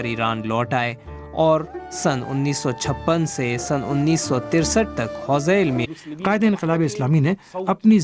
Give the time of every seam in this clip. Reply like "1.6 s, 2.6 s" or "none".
none